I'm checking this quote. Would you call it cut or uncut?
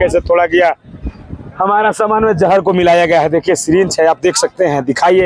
uncut